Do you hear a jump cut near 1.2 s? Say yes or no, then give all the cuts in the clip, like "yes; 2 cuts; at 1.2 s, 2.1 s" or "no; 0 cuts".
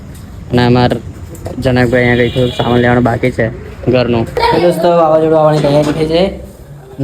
no; 1 cut; at 4.3 s